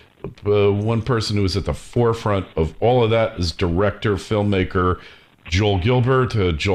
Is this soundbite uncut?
yes; 0 cuts

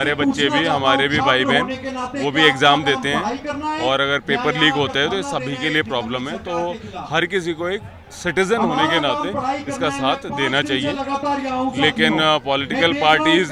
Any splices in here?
no; 0 cuts

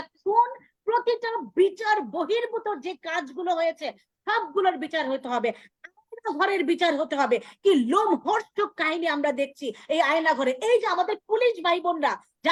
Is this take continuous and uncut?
yes; 0 cuts

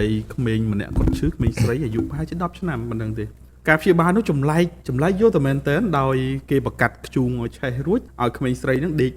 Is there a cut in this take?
yes; 2 cuts; at 3.4 s, 8.1 s

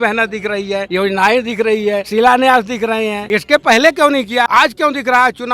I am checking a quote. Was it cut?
yes; 4 cuts; at 0.9 s, 2.1 s, 3.2 s, 4.5 s

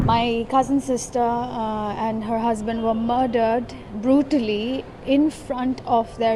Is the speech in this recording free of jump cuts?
yes; 0 cuts

